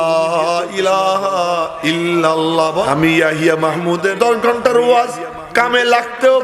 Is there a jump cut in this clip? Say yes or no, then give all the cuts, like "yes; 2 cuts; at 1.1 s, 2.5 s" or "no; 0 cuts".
yes; 2 cuts; at 2.8 s, 4.1 s